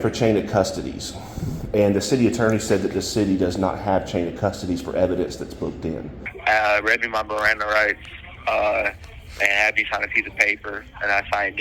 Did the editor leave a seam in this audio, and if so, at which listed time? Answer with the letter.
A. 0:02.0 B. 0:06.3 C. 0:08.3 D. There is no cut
B